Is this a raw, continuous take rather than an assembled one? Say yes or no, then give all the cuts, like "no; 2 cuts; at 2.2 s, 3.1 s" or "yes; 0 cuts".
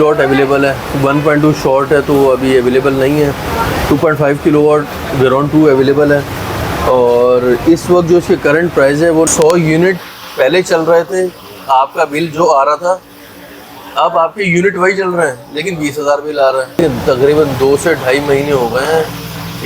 no; 2 cuts; at 9.3 s, 16.7 s